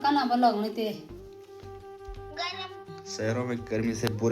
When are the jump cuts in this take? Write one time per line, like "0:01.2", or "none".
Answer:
0:02.9

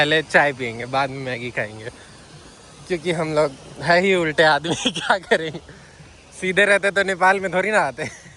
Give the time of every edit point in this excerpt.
none

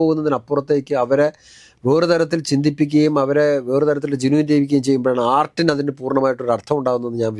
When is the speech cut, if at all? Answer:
none

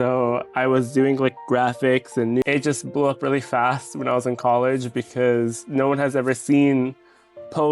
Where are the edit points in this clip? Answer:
0:02.4

